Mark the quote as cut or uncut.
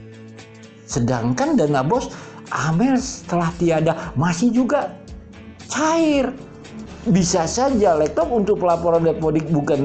cut